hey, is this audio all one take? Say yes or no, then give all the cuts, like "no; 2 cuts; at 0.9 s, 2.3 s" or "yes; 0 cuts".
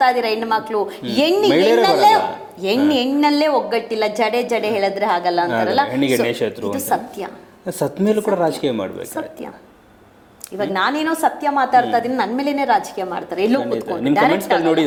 yes; 0 cuts